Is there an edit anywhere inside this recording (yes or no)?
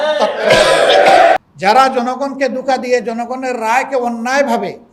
yes